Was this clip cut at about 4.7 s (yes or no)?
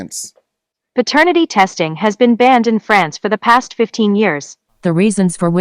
yes